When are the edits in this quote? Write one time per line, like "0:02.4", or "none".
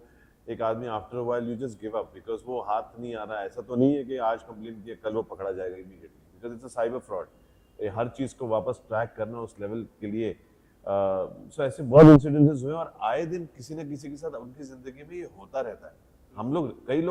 none